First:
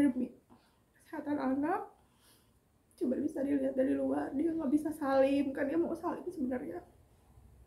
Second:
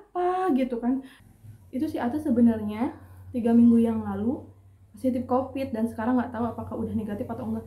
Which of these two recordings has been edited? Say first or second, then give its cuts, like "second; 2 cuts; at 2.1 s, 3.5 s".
second; 1 cut; at 1.2 s